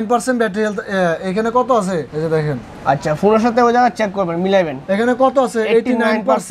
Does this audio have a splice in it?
no; 0 cuts

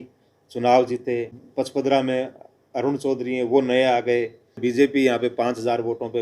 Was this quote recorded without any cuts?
no; 2 cuts; at 1.4 s, 4.6 s

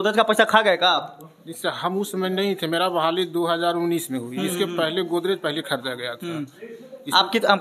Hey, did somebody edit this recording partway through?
no; 0 cuts

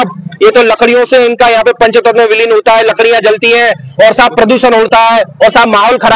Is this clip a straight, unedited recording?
yes; 0 cuts

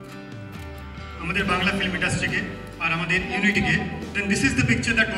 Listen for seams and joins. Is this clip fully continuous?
yes; 0 cuts

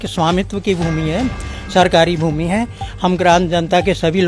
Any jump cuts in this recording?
no; 0 cuts

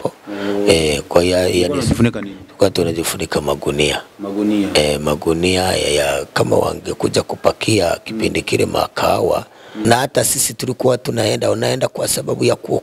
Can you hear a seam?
yes; 1 cut; at 9.8 s

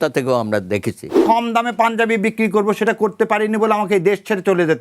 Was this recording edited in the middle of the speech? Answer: yes; 1 cut; at 1.2 s

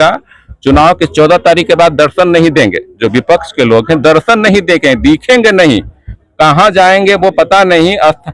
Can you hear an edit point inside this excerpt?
no; 0 cuts

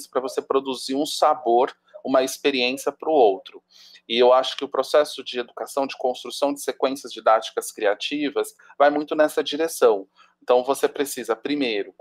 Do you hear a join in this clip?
no; 0 cuts

